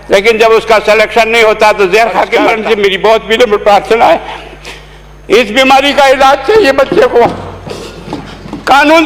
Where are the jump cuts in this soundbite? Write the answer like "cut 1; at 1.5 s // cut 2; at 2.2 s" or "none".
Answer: cut 1; at 2.6 s